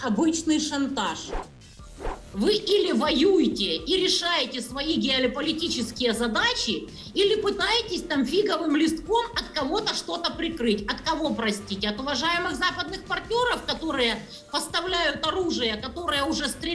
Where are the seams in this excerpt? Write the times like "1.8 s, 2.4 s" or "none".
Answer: 1.6 s